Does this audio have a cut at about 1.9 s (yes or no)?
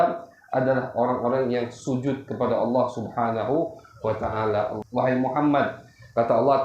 no